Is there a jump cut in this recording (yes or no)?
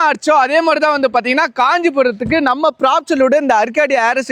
no